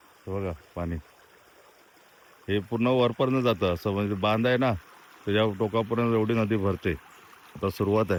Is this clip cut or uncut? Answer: uncut